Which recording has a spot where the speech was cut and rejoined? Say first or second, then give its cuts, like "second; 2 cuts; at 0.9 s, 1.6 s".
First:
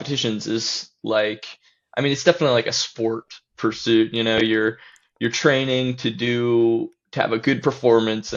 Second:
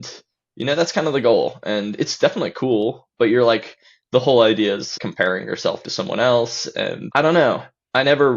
second; 2 cuts; at 4.9 s, 7.0 s